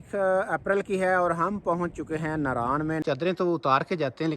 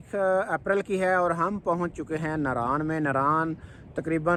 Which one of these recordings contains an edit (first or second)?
first